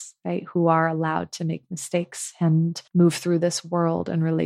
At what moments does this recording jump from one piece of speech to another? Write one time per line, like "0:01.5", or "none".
0:02.8